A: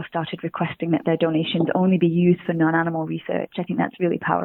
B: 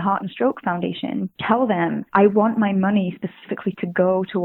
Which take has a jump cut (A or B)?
B